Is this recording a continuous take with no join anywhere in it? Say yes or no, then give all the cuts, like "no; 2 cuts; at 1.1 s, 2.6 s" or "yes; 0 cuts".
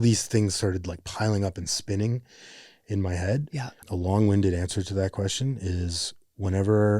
no; 1 cut; at 3.8 s